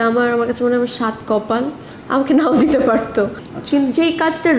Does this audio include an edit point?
yes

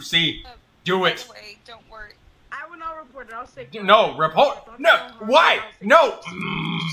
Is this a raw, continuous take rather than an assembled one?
yes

